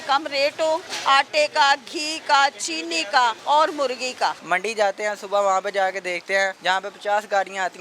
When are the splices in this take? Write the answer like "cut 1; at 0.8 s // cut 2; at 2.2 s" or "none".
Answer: cut 1; at 0.9 s // cut 2; at 3.4 s // cut 3; at 4.4 s // cut 4; at 6.6 s